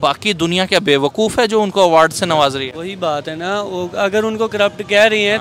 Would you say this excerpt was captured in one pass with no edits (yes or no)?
yes